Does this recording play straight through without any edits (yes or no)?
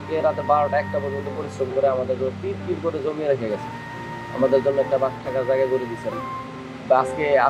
yes